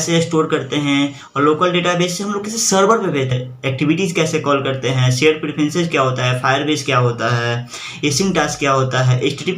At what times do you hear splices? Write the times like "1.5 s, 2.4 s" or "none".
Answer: 3.3 s